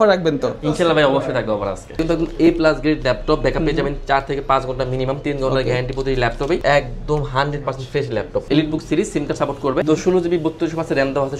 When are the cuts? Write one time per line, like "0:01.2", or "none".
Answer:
0:02.0
0:06.6
0:08.5
0:09.8

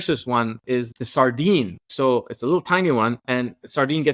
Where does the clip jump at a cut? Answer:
0:00.9
0:01.9

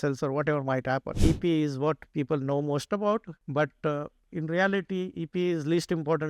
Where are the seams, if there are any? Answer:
0:01.1
0:03.4

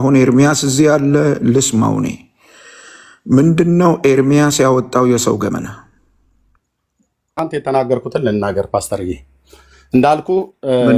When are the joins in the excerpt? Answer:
0:07.4

